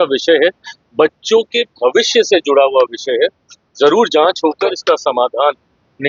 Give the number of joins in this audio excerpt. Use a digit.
0